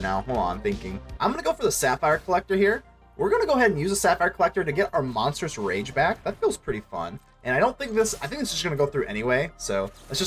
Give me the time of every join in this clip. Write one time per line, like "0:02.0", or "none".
0:01.0